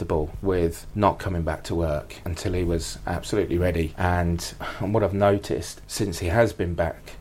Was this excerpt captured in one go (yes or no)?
yes